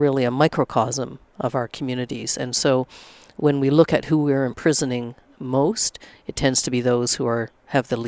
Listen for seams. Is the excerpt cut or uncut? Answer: uncut